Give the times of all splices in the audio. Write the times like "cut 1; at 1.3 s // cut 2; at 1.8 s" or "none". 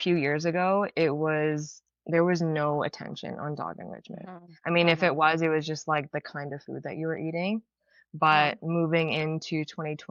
none